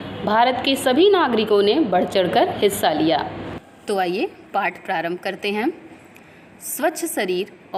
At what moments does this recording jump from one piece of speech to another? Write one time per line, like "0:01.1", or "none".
none